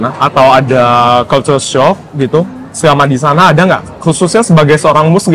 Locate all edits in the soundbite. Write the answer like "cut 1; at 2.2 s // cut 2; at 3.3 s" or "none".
none